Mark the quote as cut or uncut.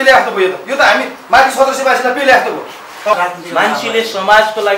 cut